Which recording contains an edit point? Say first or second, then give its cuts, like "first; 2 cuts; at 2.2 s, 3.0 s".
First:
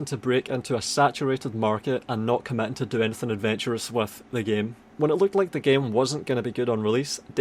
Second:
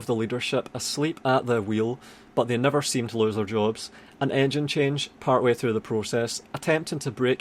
first; 1 cut; at 4.8 s